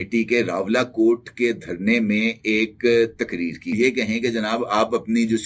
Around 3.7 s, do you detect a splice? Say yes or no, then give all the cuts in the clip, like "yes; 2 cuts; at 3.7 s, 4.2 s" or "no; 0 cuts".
yes; 1 cut; at 3.7 s